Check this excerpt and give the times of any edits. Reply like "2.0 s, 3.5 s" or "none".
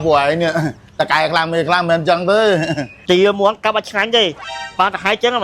2.9 s